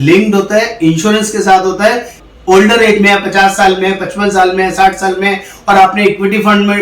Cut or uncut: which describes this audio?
cut